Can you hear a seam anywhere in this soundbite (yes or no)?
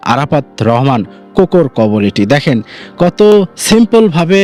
no